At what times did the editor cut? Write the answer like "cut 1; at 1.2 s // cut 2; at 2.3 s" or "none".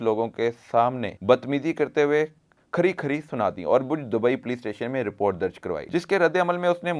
cut 1; at 1.1 s // cut 2; at 5.8 s

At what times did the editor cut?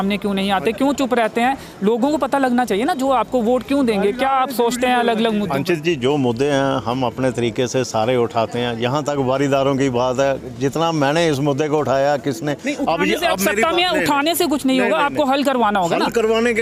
none

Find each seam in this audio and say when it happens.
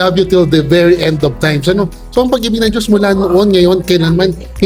none

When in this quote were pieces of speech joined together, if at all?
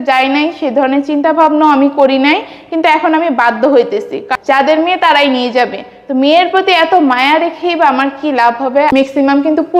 cut 1; at 4.3 s // cut 2; at 8.9 s

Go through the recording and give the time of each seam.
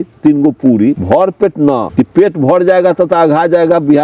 cut 1; at 1.0 s // cut 2; at 1.9 s

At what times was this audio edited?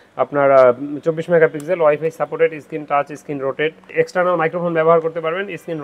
cut 1; at 3.9 s

